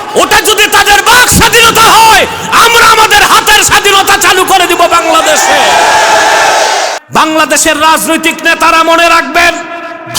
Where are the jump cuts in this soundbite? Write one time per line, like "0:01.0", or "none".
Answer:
0:07.0